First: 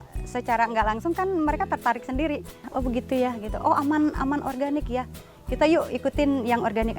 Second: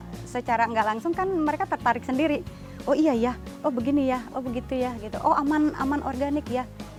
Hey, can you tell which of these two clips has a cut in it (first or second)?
first